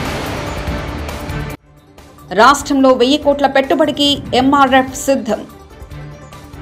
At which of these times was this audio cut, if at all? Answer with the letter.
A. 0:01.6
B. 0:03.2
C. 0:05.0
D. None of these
A